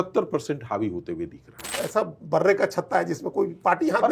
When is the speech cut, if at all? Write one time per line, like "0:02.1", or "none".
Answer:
0:01.8